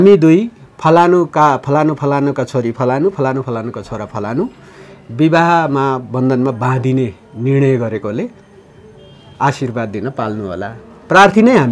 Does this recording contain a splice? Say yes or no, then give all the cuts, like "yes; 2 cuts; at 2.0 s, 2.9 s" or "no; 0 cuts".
no; 0 cuts